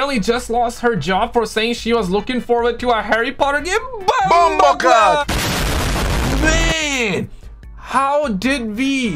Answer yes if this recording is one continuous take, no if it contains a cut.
no